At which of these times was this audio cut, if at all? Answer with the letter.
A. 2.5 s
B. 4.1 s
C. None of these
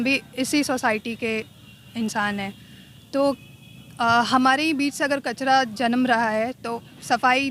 C